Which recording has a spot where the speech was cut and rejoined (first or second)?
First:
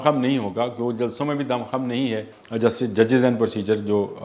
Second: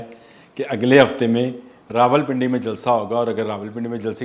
first